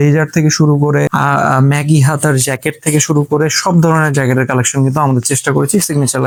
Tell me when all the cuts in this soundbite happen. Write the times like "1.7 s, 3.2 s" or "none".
none